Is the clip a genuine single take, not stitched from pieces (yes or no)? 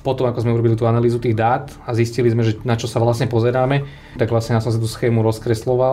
no